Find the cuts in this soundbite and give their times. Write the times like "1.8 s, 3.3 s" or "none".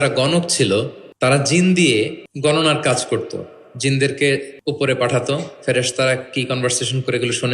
1.0 s, 2.2 s, 4.5 s